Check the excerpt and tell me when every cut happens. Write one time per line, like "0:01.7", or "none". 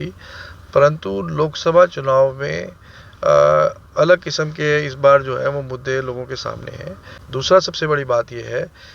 0:07.2